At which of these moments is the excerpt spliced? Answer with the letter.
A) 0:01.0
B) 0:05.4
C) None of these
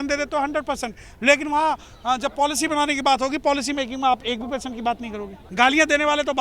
B